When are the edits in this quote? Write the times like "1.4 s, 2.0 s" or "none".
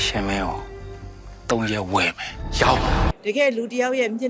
3.2 s